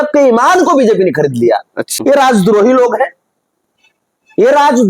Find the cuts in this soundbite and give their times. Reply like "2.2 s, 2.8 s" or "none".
1.9 s